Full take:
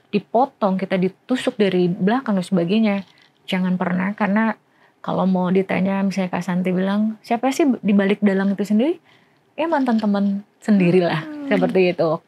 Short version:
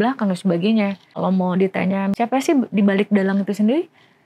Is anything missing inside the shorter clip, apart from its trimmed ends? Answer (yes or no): yes